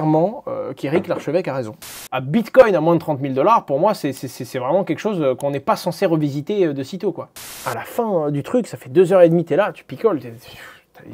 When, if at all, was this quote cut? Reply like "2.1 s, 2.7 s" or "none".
2.1 s, 7.3 s

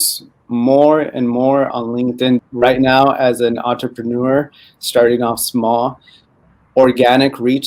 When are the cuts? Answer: 2.4 s

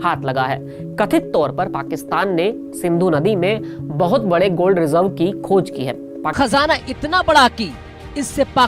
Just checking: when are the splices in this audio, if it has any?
6.2 s

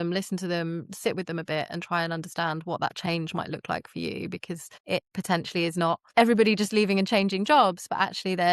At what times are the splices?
4.7 s, 6.0 s

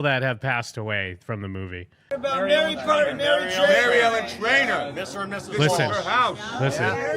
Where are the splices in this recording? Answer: 2.1 s

